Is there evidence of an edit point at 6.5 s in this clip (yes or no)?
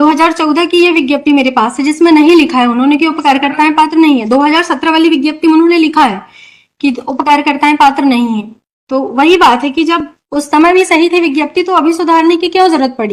no